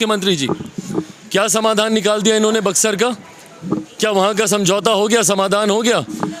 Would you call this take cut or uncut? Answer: uncut